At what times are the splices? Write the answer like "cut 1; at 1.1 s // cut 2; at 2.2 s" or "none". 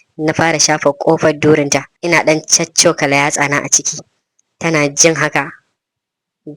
cut 1; at 1.9 s